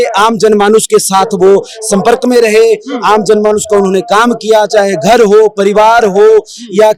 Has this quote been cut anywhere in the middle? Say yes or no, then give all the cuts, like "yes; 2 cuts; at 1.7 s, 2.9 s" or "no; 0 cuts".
no; 0 cuts